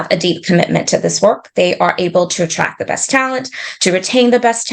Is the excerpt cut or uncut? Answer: uncut